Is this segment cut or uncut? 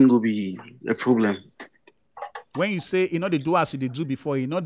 uncut